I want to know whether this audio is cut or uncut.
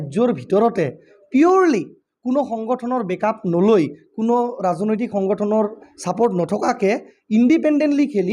uncut